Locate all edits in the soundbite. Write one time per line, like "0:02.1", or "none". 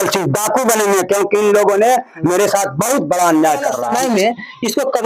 0:03.8